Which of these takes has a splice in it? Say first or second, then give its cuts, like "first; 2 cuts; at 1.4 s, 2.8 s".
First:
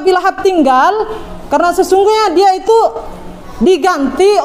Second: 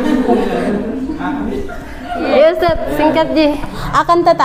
second; 1 cut; at 3.6 s